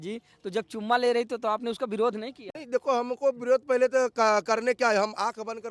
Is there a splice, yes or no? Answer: no